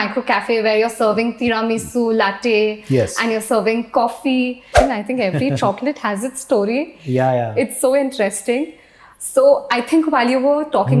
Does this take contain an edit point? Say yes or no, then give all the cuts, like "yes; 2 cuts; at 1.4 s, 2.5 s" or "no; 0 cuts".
yes; 1 cut; at 4.7 s